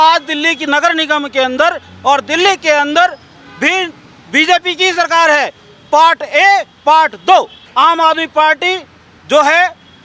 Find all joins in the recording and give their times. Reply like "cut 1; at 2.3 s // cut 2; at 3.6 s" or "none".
cut 1; at 7.6 s